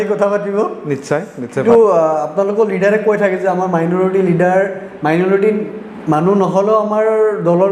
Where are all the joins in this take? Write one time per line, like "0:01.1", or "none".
0:01.6

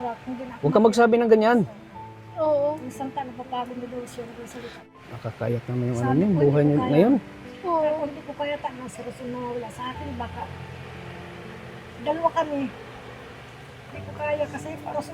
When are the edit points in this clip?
0:04.9

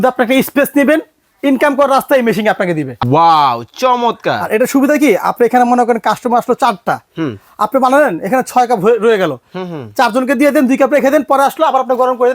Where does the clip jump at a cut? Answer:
0:02.9

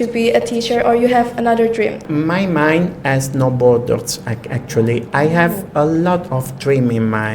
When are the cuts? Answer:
0:02.0

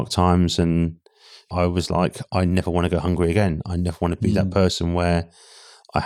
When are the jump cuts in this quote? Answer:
0:01.5

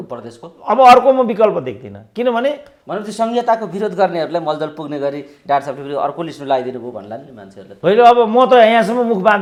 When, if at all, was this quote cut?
none

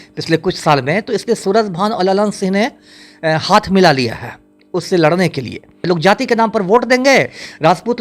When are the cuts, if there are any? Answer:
0:05.8

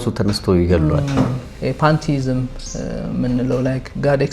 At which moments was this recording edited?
0:01.5

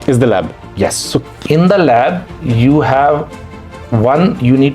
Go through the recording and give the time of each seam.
0:01.2

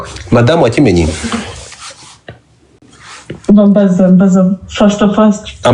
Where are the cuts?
none

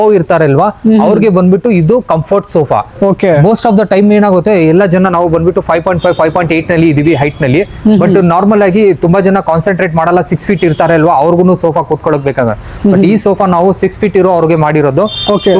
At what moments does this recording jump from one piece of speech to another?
none

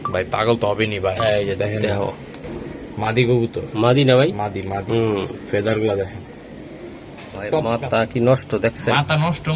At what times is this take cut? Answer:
0:07.4

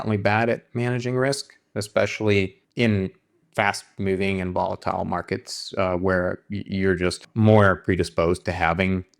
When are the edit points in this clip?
0:02.6
0:07.2

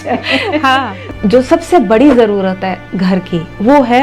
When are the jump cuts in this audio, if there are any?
0:01.0

